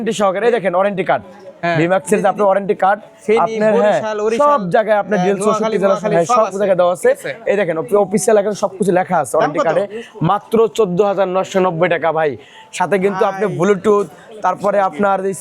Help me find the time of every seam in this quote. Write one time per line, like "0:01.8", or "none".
none